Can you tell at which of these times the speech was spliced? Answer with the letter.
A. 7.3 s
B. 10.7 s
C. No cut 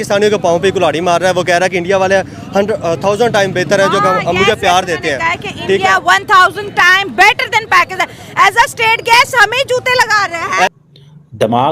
B